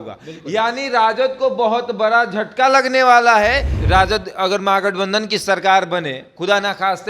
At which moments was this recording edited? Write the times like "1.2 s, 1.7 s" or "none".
3.7 s